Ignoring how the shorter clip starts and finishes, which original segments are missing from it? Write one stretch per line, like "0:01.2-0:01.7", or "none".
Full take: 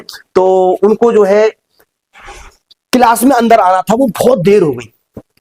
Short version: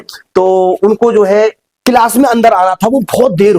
0:01.7-0:02.7